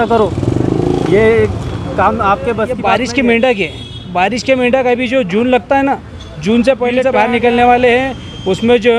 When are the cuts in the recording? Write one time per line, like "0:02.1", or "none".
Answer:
0:02.8
0:07.1